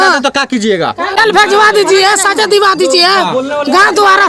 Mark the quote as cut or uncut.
uncut